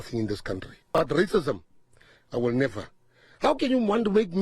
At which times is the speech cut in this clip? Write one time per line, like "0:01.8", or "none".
0:00.9